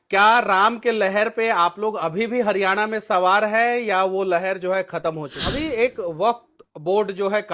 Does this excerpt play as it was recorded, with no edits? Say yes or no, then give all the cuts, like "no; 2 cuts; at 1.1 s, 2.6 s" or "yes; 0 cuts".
no; 1 cut; at 5.3 s